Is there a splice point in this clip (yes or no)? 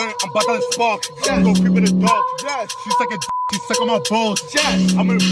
no